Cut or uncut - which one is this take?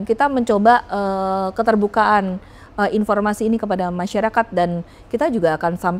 uncut